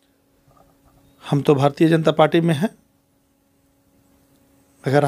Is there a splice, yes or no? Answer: no